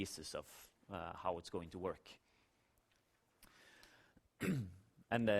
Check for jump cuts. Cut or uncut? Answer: uncut